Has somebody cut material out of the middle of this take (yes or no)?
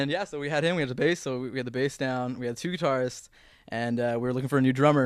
no